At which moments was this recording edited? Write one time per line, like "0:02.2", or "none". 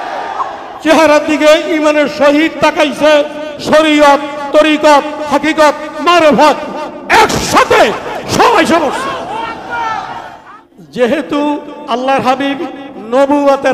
0:10.4